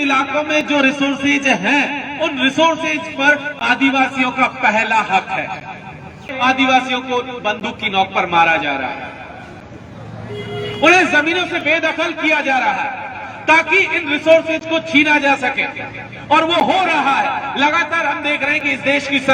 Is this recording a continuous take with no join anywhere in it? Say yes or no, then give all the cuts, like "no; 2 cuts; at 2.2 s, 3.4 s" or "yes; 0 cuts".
no; 1 cut; at 6.3 s